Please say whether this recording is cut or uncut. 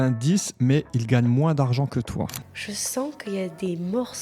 cut